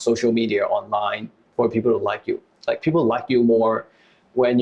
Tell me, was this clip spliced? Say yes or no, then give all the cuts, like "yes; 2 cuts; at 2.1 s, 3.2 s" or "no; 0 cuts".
yes; 1 cut; at 2.5 s